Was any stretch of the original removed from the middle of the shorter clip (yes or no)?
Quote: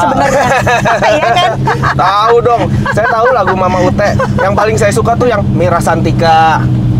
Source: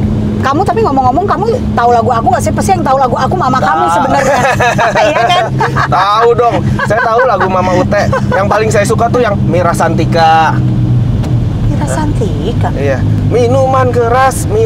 no